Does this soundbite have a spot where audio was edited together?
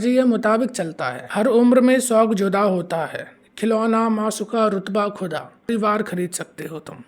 yes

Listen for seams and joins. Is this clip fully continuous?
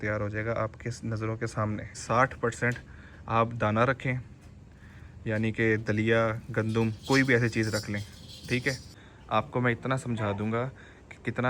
no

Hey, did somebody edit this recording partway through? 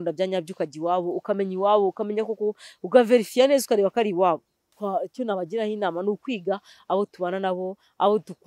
yes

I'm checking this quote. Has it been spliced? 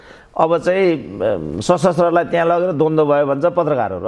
no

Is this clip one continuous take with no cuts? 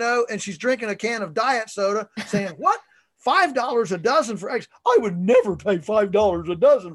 yes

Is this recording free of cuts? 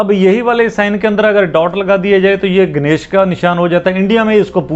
yes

